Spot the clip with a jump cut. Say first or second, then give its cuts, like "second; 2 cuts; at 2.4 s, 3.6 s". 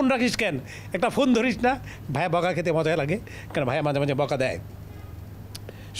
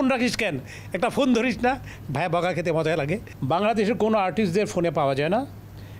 second; 1 cut; at 3.3 s